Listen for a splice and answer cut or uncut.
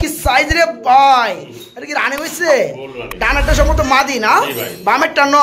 uncut